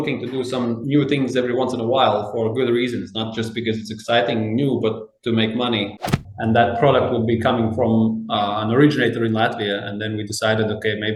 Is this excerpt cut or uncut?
cut